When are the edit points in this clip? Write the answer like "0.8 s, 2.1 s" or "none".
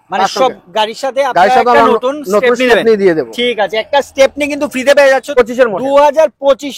5.3 s